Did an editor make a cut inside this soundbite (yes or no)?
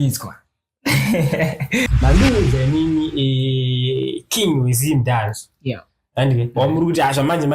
yes